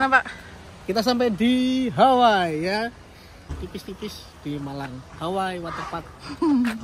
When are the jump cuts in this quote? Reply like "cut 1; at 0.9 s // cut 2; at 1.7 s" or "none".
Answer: cut 1; at 3.5 s